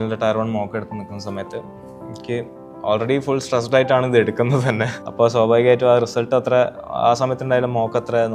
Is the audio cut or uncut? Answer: cut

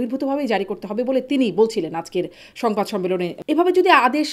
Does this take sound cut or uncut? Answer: cut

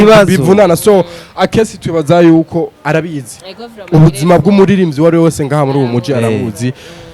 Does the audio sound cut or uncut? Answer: uncut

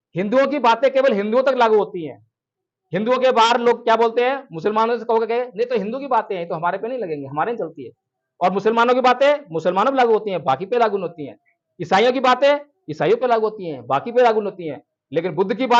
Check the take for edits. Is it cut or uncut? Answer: uncut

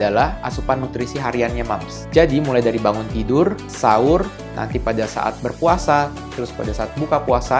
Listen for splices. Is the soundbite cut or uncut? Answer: uncut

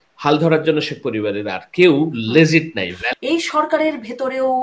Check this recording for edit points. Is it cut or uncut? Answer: cut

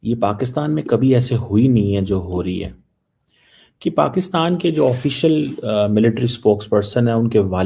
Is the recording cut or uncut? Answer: uncut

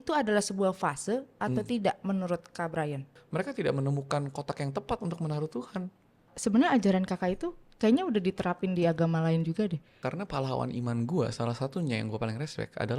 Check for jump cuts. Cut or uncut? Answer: cut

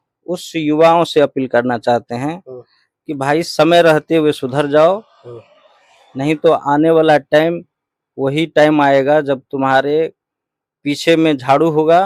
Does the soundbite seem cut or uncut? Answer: uncut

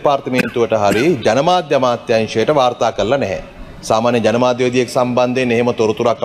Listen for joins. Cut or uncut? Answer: uncut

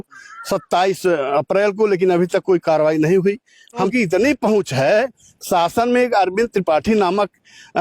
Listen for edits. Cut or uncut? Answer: cut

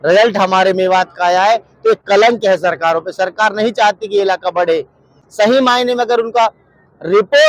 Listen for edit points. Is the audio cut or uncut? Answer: cut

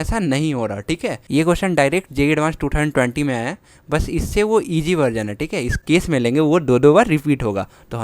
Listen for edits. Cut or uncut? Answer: cut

